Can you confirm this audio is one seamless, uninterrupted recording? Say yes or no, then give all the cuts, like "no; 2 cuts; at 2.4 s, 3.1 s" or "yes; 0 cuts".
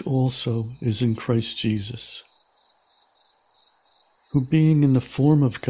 no; 2 cuts; at 2.2 s, 4.3 s